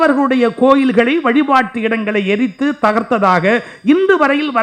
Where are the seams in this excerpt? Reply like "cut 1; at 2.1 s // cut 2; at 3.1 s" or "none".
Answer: none